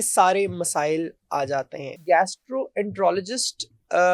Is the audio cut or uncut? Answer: cut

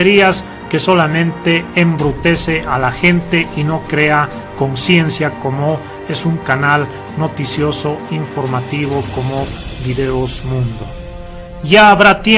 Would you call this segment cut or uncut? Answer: uncut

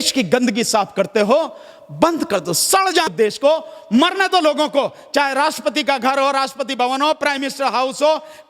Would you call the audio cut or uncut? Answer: cut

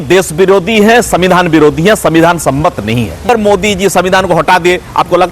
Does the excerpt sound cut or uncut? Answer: cut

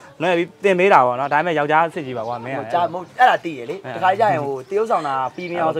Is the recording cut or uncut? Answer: uncut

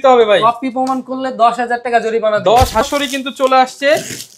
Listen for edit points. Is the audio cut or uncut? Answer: cut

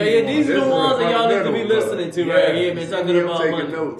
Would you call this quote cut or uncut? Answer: uncut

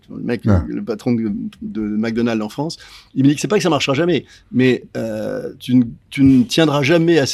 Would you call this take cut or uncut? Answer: uncut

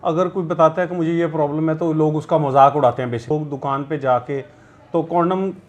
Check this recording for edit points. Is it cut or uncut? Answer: cut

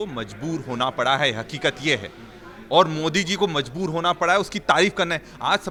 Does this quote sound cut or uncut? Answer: uncut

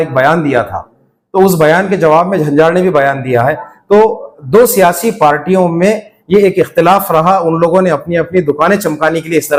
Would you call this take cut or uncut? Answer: uncut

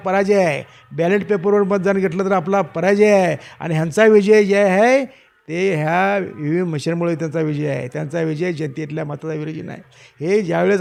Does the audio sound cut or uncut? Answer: uncut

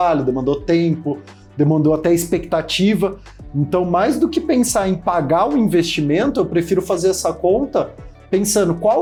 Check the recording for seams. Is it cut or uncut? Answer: uncut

